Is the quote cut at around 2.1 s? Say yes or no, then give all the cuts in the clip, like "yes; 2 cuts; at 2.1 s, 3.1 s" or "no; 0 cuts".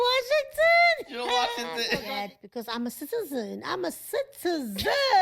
yes; 1 cut; at 2.1 s